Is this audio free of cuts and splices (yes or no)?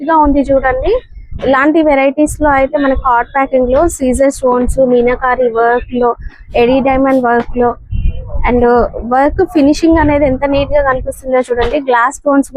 yes